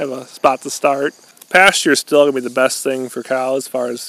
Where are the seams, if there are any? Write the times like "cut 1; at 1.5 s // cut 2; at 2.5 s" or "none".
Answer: cut 1; at 1.3 s